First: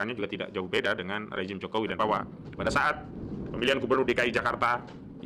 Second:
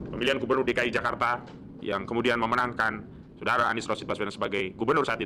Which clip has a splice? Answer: first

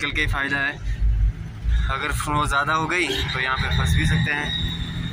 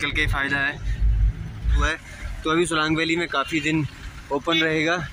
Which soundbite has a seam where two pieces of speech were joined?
second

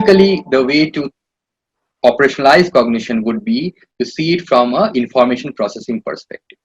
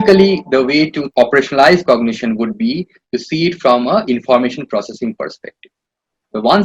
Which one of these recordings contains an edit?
second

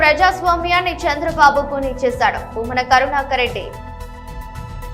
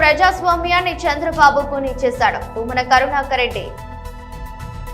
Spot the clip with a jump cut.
first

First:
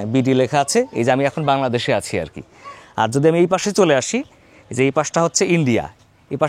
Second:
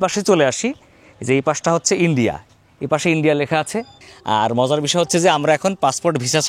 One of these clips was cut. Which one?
second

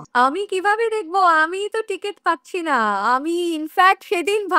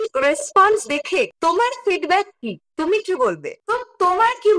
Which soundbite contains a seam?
second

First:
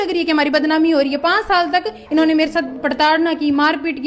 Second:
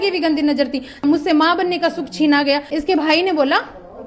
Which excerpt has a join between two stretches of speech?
second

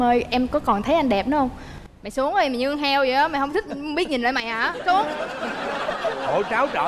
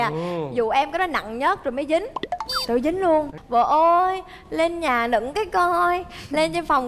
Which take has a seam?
second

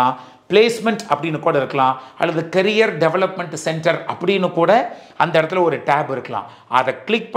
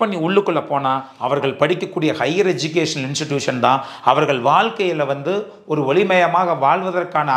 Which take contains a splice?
second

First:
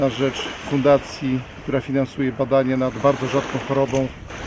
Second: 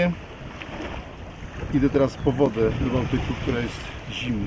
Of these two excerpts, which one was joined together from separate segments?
first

